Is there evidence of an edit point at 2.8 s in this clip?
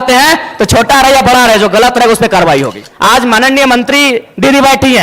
yes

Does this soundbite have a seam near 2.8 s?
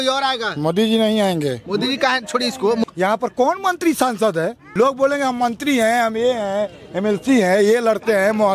yes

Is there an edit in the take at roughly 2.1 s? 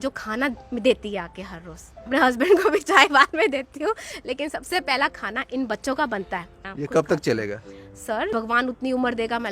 yes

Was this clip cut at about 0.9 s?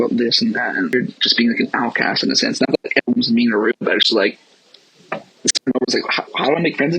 yes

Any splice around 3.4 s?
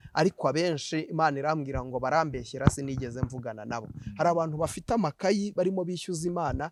no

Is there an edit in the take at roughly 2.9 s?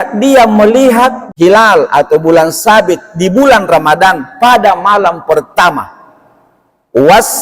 no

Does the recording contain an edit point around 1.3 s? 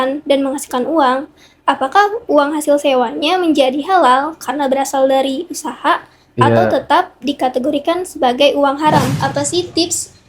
no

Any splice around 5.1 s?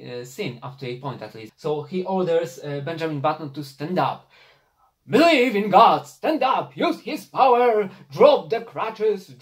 no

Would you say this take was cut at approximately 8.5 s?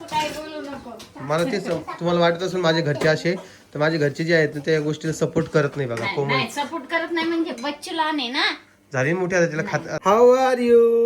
no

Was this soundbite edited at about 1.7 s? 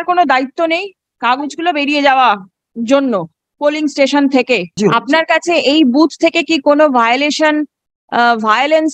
no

